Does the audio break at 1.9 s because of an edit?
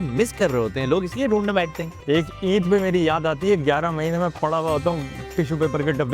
yes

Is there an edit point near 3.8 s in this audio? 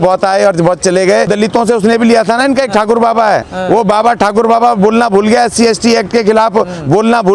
no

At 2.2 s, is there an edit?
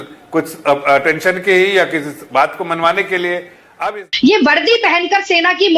no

